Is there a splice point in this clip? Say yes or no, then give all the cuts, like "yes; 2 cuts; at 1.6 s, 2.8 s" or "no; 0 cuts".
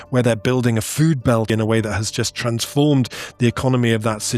yes; 1 cut; at 1.5 s